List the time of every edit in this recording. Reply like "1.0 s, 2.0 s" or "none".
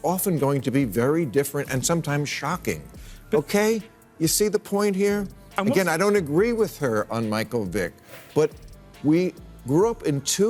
3.1 s